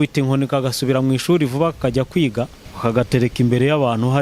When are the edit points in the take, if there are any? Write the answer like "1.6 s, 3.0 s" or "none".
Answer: 2.6 s